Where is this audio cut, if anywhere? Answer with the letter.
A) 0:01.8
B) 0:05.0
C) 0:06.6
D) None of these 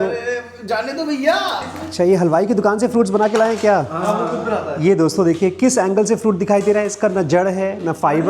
A